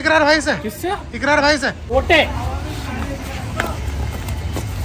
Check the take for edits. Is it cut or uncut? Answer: cut